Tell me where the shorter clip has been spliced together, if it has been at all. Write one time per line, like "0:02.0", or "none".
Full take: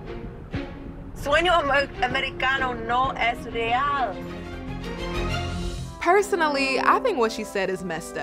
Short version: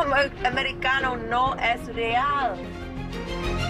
0:02.7